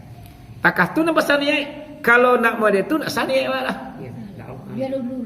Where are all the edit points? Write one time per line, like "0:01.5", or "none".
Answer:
none